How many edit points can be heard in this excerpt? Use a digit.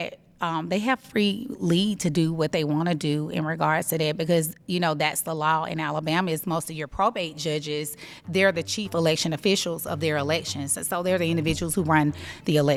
0